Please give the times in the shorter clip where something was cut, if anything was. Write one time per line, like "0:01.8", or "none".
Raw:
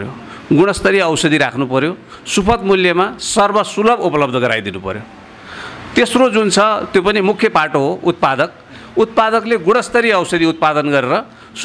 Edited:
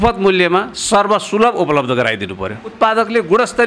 0:02.7